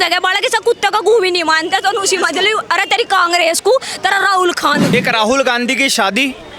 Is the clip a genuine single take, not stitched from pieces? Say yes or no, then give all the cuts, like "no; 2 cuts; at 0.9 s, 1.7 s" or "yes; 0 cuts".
no; 1 cut; at 4.9 s